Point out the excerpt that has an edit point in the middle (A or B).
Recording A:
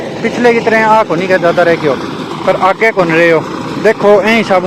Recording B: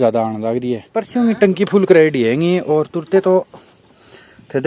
B